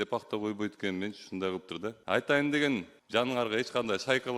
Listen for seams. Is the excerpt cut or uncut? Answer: cut